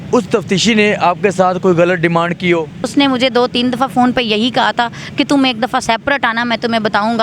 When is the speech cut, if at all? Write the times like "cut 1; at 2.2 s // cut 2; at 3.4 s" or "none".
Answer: cut 1; at 2.8 s